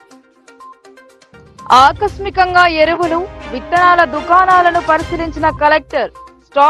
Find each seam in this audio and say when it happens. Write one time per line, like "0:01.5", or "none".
none